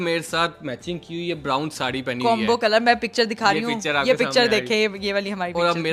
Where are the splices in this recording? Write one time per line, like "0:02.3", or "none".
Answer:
none